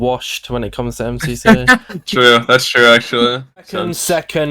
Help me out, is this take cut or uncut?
cut